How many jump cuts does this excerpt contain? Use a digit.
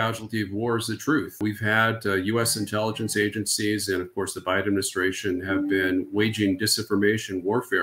1